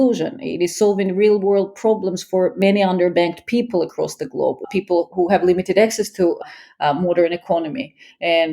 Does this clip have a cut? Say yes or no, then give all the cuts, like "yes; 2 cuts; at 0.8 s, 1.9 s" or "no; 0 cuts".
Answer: yes; 1 cut; at 4.6 s